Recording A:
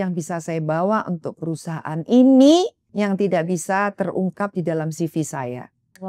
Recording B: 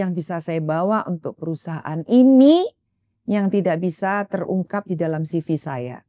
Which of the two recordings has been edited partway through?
A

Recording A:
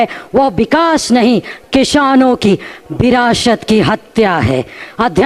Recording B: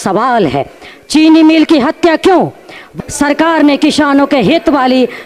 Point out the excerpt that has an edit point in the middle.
B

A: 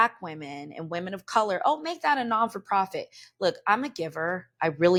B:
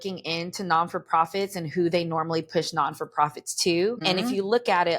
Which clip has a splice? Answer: B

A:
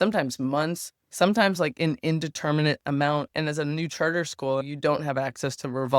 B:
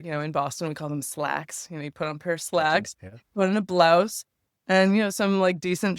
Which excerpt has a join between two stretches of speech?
A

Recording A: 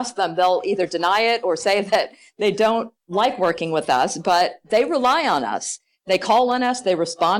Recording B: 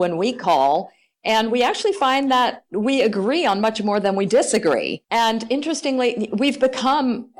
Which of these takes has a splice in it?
B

